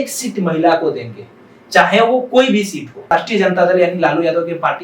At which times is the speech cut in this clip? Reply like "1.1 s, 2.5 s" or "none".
3.1 s